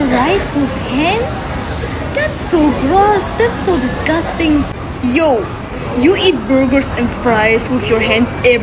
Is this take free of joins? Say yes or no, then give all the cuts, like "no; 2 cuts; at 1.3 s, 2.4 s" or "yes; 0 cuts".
yes; 0 cuts